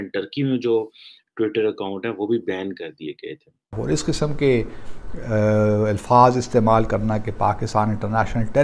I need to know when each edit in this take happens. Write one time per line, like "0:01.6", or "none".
0:03.8